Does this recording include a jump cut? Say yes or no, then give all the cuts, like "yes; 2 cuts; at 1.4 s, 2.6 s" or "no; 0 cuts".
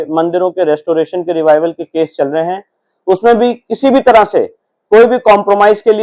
no; 0 cuts